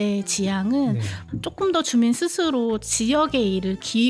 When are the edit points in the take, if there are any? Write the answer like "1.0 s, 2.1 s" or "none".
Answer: 1.2 s